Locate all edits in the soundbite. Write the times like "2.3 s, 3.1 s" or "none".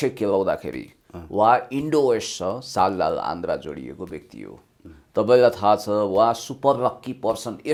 none